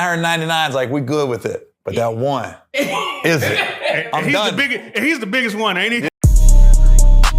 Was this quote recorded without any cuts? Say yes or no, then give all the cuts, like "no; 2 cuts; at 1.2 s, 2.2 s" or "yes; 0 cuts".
no; 1 cut; at 6.1 s